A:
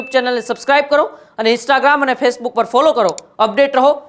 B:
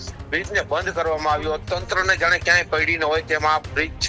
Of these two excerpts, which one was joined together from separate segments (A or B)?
B